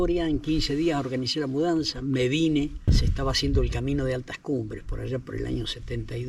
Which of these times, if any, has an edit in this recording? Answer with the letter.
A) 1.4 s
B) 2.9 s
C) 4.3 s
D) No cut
B